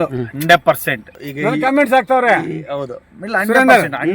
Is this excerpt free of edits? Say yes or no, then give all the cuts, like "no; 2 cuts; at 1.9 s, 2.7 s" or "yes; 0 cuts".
no; 1 cut; at 1.1 s